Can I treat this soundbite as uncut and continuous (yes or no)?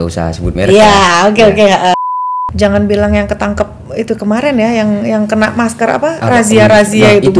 no